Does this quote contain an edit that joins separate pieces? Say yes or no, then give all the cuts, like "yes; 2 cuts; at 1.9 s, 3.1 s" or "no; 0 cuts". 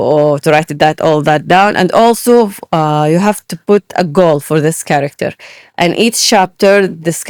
no; 0 cuts